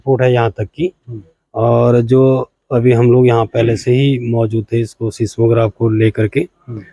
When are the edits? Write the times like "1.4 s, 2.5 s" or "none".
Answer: none